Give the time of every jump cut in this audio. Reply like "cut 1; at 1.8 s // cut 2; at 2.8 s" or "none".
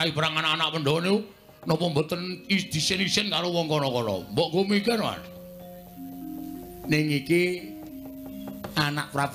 none